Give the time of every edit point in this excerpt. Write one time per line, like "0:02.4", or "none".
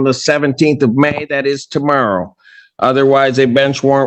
none